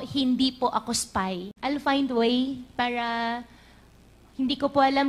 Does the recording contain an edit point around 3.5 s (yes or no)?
no